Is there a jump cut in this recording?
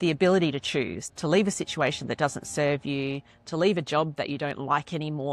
yes; 1 cut; at 1.0 s

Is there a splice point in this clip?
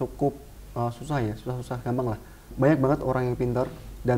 yes; 1 cut; at 2.5 s

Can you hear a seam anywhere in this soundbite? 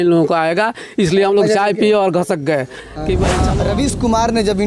yes; 1 cut; at 3.4 s

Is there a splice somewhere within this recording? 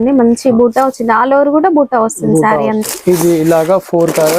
yes; 1 cut; at 2.9 s

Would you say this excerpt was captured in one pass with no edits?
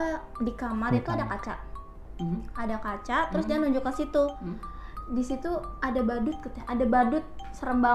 yes; 0 cuts

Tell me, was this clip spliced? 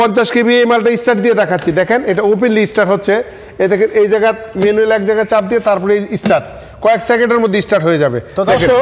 no; 0 cuts

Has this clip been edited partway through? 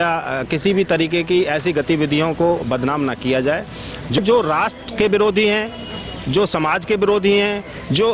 yes; 1 cut; at 4.2 s

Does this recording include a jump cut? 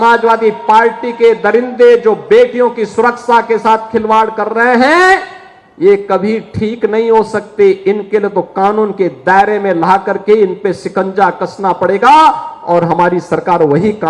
no; 0 cuts

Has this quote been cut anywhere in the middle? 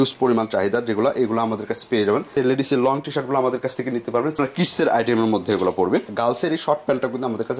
yes; 3 cuts; at 2.3 s, 4.4 s, 6.1 s

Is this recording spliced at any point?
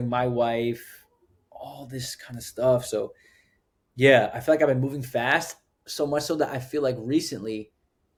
no; 0 cuts

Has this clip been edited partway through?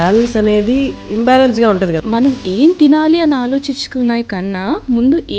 yes; 2 cuts; at 1.0 s, 2.0 s

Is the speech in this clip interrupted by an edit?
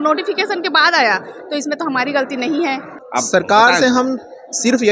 yes; 1 cut; at 2.9 s

